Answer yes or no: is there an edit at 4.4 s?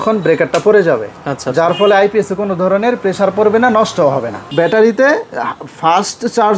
yes